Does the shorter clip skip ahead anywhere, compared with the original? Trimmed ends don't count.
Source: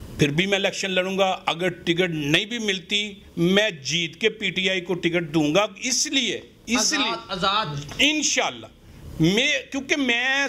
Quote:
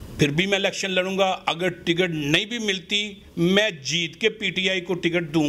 no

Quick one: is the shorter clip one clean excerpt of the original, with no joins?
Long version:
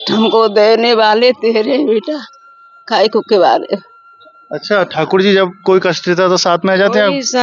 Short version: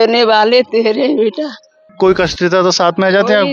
no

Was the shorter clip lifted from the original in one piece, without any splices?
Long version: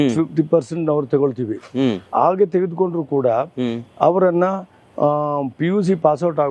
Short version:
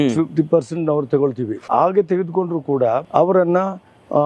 no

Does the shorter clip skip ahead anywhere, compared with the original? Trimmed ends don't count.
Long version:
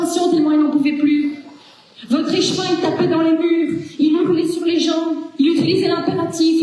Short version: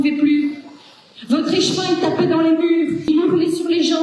yes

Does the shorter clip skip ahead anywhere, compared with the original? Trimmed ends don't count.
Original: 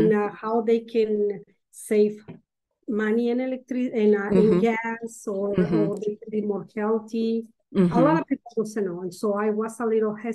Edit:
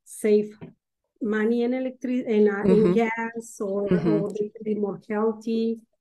no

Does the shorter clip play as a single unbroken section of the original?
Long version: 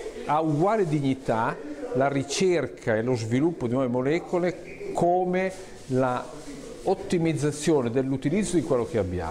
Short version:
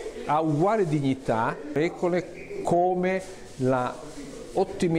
no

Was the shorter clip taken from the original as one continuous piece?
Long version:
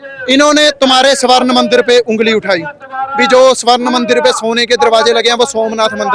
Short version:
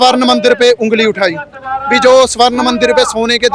yes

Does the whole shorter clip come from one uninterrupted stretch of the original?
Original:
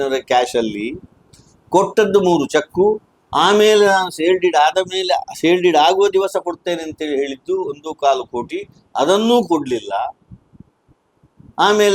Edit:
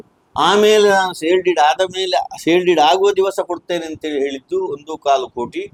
yes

